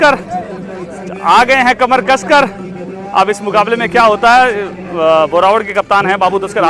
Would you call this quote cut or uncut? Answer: uncut